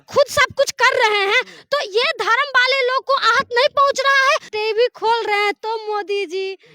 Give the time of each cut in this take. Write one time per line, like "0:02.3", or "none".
0:04.5